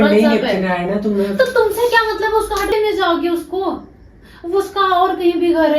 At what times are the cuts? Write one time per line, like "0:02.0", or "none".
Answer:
0:02.7